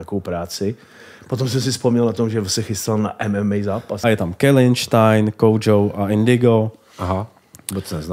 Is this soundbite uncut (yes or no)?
no